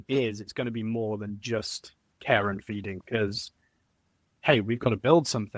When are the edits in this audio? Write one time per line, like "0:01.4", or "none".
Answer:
0:03.0

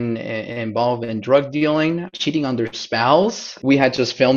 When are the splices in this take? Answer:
0:02.2
0:03.5

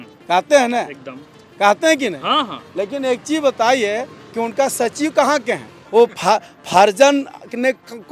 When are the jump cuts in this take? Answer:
0:05.7

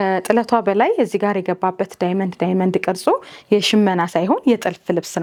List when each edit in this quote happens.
none

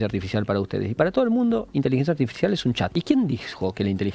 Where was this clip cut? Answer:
0:02.9

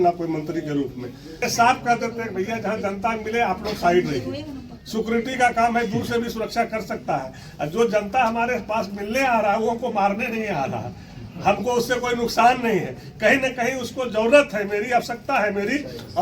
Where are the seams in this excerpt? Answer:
0:01.4

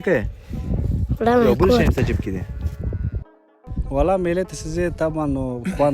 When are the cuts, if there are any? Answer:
0:03.2

